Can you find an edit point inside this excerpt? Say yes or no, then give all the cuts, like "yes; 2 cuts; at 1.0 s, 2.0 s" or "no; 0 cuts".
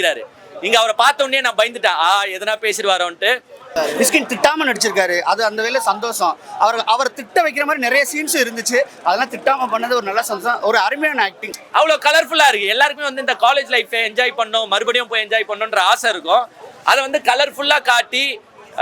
yes; 2 cuts; at 3.7 s, 11.5 s